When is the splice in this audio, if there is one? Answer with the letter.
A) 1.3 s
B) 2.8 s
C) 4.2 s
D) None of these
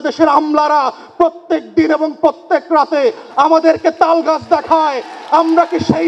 D